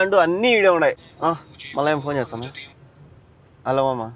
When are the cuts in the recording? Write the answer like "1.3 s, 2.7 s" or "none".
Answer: 1.1 s